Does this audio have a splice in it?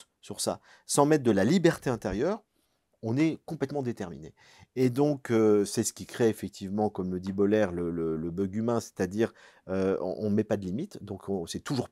no; 0 cuts

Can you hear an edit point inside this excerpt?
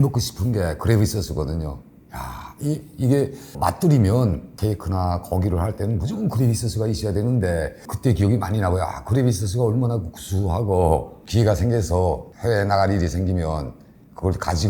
yes; 3 cuts; at 3.5 s, 7.9 s, 11.2 s

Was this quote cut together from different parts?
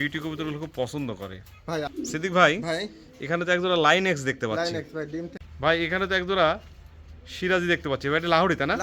yes; 2 cuts; at 1.9 s, 5.4 s

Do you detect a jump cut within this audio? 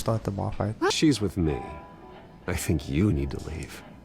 yes; 1 cut; at 0.9 s

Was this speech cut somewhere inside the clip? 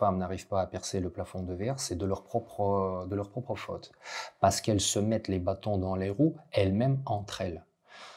no; 0 cuts

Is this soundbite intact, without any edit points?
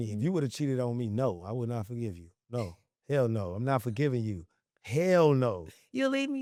yes; 0 cuts

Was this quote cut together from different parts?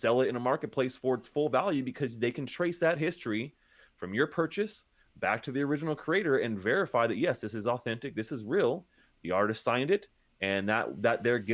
no; 0 cuts

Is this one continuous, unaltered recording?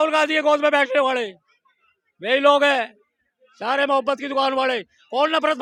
yes; 0 cuts

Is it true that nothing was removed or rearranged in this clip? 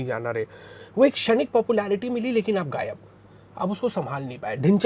yes; 0 cuts

